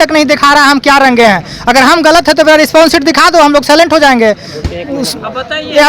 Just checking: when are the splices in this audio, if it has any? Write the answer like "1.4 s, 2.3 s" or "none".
none